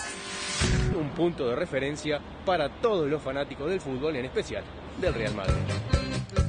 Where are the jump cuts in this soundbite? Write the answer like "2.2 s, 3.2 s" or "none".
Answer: 0.9 s

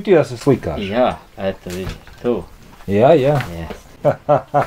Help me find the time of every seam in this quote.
none

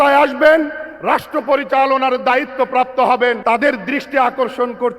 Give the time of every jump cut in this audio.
3.4 s

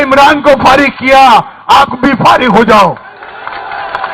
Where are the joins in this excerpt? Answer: none

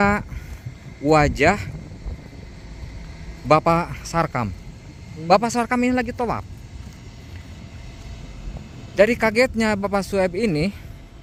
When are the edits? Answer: none

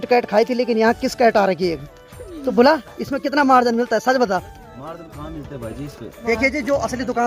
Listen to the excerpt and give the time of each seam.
none

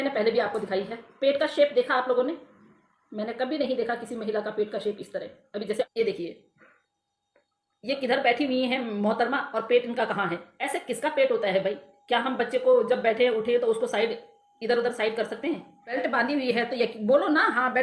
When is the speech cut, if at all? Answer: 5.9 s, 10.5 s, 16.0 s

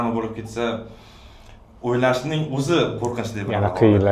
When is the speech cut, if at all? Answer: none

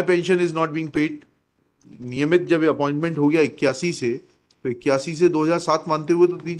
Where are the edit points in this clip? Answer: 1.8 s

